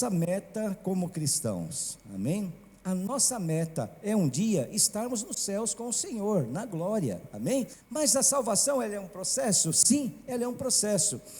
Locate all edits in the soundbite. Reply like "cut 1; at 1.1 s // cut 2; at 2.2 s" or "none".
cut 1; at 7.8 s